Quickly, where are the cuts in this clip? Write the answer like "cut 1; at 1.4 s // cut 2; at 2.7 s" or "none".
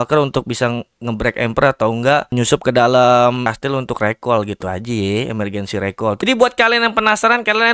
cut 1; at 6.2 s